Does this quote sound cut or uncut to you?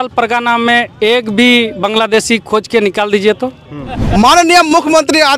cut